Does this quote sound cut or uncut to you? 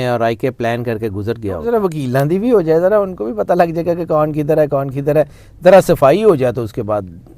cut